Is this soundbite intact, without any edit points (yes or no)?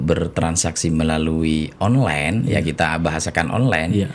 yes